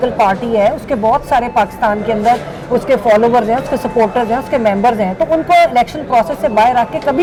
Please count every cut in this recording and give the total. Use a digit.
0